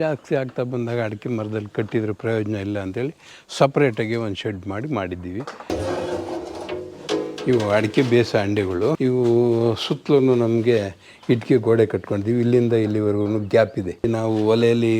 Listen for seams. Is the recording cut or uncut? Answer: cut